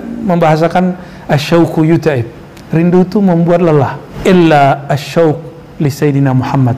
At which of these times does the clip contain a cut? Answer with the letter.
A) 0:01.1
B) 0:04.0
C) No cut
B